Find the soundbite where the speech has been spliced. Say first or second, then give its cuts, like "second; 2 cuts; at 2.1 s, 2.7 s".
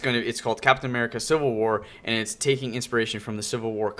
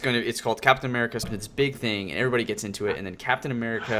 first; 1 cut; at 1.2 s